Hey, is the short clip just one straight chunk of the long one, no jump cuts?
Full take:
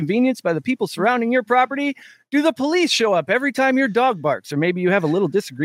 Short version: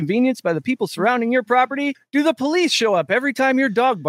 no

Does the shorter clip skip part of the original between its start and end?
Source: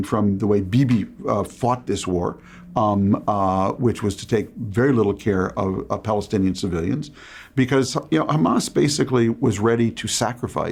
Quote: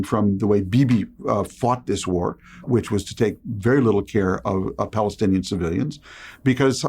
yes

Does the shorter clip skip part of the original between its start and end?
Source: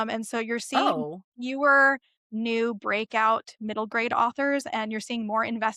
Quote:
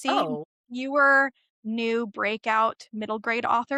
no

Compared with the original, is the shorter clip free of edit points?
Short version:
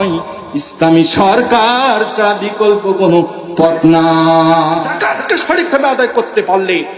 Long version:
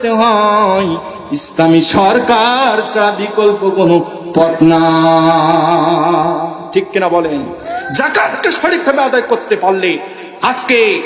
no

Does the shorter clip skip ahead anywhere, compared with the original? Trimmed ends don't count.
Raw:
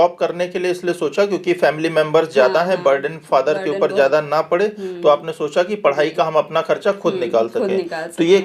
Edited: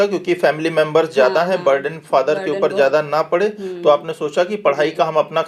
no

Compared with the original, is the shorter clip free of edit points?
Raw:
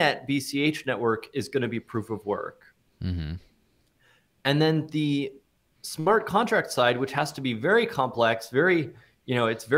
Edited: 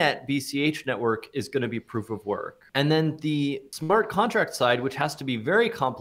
no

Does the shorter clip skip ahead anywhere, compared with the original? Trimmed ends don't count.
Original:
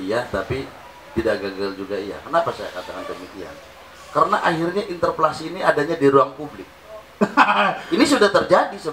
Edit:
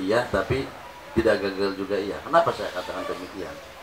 no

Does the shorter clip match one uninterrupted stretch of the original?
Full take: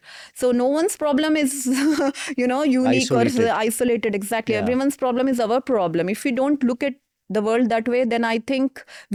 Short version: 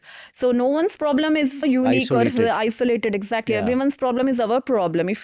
no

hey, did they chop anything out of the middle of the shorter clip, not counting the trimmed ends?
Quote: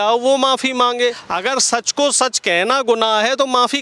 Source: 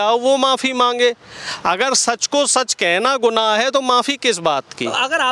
yes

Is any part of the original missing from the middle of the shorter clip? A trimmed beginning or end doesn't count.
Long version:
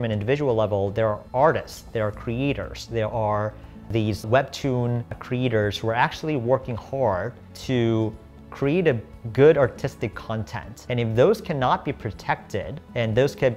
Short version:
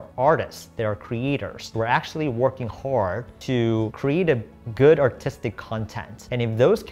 yes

